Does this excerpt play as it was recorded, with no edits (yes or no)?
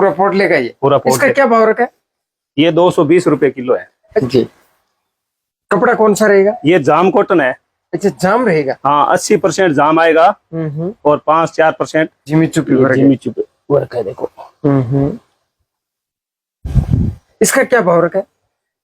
no